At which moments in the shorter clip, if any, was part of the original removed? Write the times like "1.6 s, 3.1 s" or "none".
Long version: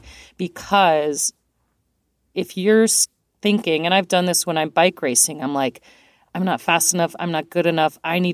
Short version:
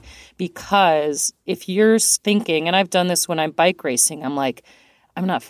1.3 s, 2.1 s